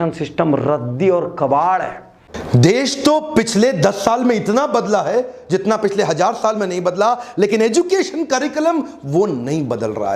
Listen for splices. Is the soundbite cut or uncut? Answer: cut